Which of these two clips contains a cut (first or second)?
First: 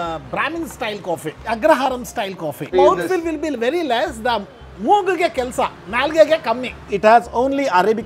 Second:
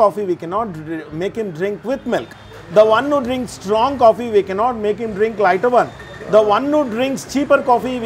first